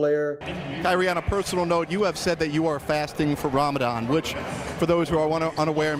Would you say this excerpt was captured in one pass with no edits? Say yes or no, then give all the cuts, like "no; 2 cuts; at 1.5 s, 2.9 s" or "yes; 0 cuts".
yes; 0 cuts